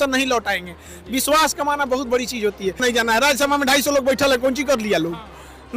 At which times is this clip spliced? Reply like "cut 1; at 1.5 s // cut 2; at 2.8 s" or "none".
cut 1; at 2.8 s